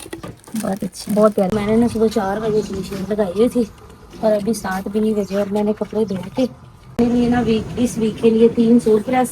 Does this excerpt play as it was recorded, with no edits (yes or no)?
no